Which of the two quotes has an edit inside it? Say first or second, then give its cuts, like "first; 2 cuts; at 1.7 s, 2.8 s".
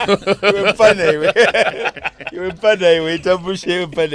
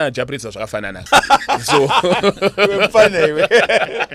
second; 1 cut; at 1.0 s